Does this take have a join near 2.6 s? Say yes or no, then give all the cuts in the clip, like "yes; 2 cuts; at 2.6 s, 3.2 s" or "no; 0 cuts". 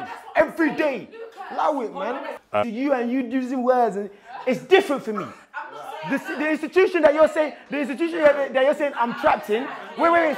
yes; 1 cut; at 2.6 s